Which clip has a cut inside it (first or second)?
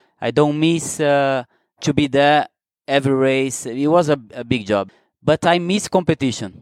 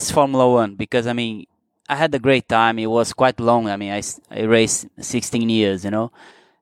first